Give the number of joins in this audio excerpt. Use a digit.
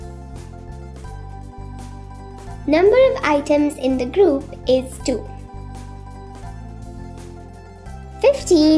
0